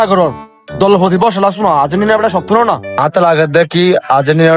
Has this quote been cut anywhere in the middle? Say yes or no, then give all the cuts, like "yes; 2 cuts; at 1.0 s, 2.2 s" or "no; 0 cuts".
yes; 1 cut; at 2.9 s